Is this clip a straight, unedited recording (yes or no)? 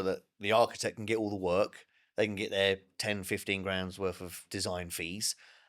no